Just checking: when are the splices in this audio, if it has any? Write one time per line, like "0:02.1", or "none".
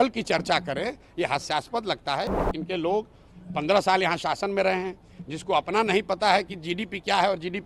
0:02.4